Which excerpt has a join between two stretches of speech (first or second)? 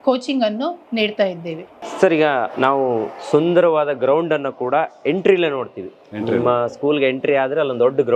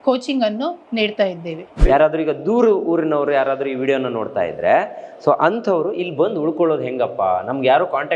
second